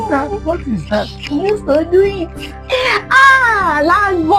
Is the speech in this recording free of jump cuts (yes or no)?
yes